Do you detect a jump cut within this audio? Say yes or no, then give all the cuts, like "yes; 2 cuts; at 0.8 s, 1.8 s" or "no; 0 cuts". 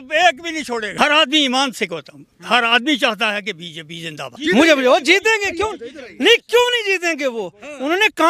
yes; 2 cuts; at 0.9 s, 4.4 s